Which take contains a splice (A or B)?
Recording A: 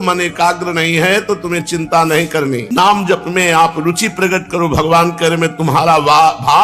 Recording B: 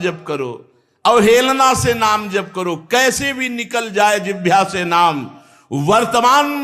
A